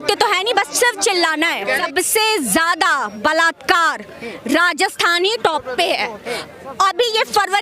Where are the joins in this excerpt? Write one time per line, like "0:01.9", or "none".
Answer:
0:01.7